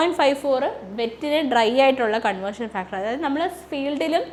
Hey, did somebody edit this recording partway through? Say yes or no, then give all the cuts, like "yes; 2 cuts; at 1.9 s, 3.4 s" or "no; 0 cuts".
no; 0 cuts